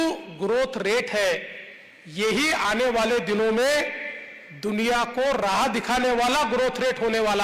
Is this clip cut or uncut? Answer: uncut